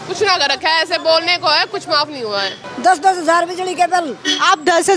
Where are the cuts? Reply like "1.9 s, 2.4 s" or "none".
2.6 s